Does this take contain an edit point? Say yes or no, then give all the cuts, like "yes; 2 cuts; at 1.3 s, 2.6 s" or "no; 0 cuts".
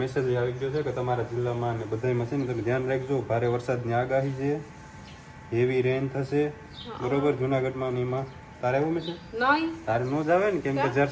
no; 0 cuts